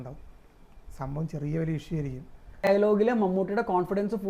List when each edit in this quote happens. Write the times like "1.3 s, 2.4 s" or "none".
2.7 s